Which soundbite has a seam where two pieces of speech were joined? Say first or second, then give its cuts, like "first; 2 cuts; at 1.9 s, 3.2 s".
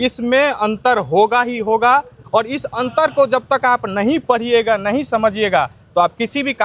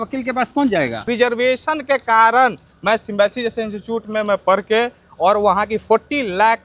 second; 1 cut; at 1.1 s